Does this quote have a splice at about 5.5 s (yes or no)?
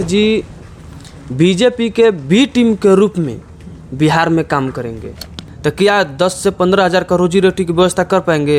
yes